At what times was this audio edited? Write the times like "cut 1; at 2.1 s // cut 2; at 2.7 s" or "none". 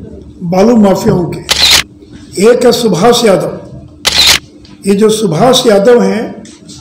none